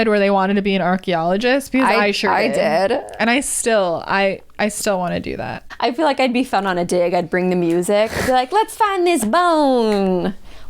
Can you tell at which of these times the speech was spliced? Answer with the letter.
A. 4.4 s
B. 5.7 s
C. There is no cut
B